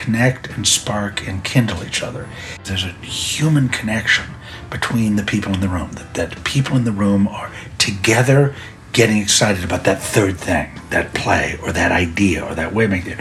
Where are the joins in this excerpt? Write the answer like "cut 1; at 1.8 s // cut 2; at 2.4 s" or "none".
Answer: cut 1; at 2.7 s

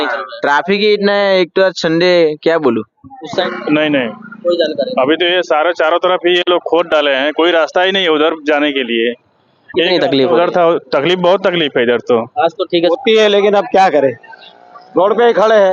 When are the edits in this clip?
cut 1; at 3.4 s // cut 2; at 12.9 s

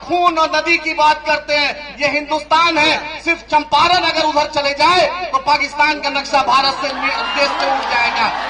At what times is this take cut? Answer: none

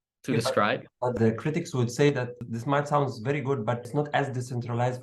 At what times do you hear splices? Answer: cut 1; at 3.9 s

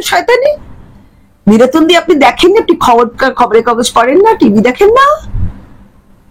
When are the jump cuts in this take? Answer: none

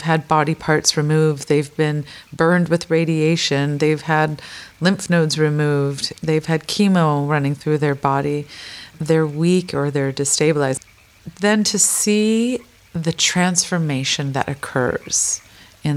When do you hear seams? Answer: cut 1; at 10.8 s

